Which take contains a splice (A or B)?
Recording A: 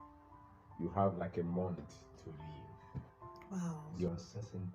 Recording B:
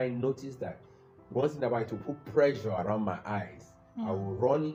A